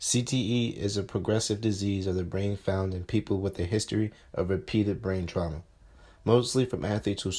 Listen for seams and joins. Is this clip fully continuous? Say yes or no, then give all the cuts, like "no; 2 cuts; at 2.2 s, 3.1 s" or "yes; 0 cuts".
yes; 0 cuts